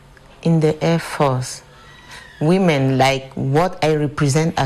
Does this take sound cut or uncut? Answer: uncut